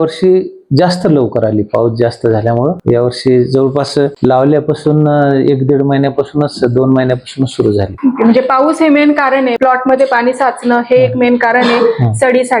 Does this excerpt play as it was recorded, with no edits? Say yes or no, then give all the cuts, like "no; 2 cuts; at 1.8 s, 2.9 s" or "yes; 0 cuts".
yes; 0 cuts